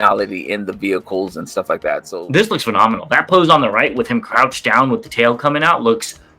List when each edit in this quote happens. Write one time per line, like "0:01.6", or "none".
0:02.0